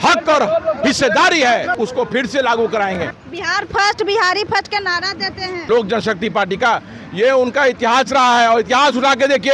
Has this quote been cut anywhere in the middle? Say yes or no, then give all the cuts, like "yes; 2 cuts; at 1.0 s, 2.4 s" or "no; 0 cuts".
yes; 3 cuts; at 1.7 s, 3.2 s, 5.7 s